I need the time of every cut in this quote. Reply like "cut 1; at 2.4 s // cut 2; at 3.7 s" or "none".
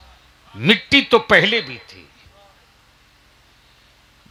none